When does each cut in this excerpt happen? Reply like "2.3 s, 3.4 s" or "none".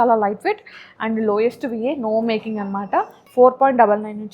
3.2 s

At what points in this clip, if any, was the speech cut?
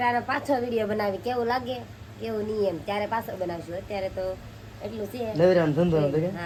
none

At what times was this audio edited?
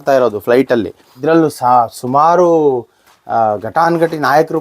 1.0 s

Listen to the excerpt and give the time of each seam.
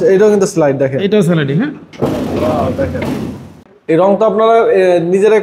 3.5 s

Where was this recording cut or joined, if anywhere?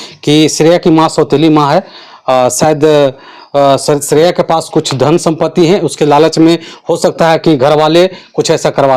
none

